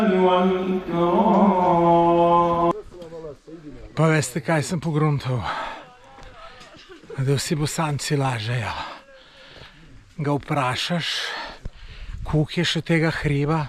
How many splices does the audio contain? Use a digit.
1